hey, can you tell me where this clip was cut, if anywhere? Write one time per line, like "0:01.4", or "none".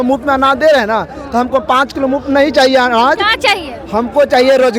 none